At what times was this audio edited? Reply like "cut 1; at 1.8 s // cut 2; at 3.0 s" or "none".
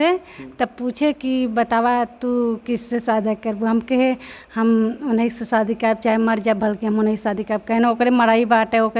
none